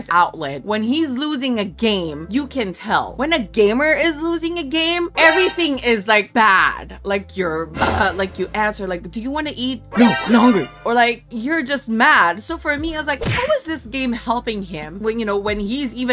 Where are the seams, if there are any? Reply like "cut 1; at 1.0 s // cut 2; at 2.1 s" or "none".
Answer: none